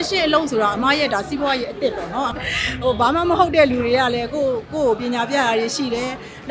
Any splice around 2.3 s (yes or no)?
yes